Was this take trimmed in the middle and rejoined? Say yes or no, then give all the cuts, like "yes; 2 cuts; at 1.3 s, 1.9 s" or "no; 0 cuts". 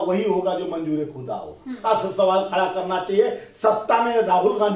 yes; 1 cut; at 1.8 s